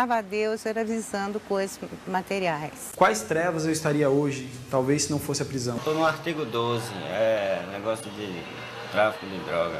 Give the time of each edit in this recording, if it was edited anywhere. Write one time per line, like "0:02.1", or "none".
0:02.8
0:05.8